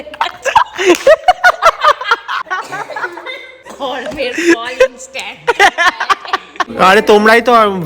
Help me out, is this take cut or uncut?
cut